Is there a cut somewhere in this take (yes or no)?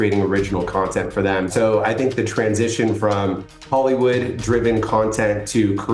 yes